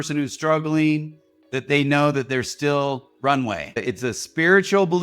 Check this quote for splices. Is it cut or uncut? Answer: cut